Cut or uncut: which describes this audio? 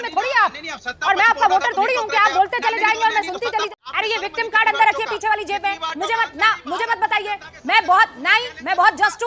cut